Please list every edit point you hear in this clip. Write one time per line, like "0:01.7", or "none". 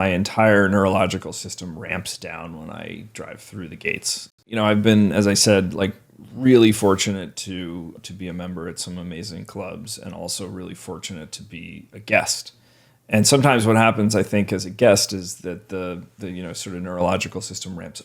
0:04.4
0:08.0